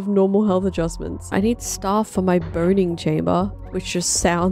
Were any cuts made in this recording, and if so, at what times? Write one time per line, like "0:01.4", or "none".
0:01.3